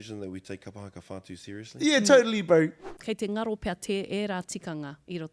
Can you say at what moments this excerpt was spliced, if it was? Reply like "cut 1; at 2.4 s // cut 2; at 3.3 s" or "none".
cut 1; at 2.9 s